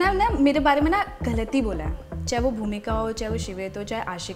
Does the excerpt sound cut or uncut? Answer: uncut